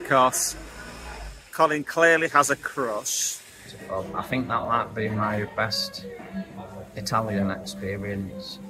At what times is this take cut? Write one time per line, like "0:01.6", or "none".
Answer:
0:03.7